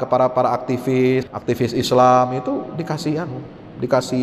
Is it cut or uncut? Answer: cut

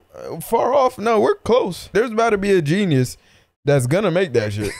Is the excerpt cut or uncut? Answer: cut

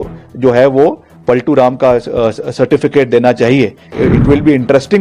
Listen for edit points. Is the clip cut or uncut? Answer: cut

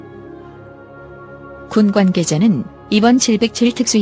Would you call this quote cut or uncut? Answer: cut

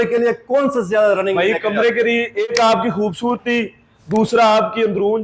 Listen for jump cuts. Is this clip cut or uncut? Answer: cut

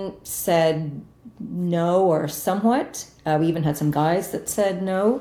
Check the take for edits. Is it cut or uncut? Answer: uncut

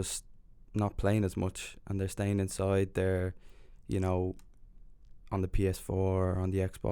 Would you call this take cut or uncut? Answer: uncut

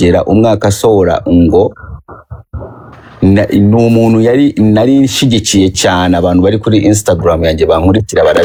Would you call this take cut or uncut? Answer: uncut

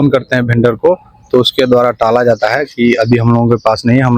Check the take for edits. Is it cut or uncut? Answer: uncut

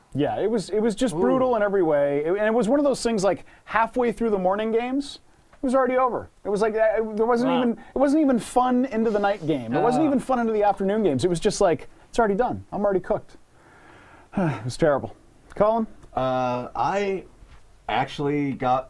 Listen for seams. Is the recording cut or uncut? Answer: uncut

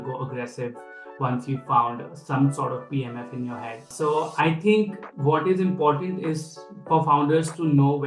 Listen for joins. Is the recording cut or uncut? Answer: uncut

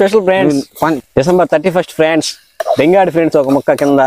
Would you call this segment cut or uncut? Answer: cut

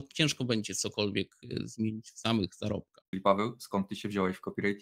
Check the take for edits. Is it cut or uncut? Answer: cut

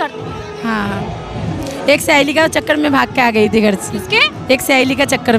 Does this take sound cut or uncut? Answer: uncut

